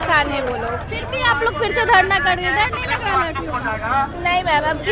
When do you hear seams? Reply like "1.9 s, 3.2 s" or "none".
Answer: 0.9 s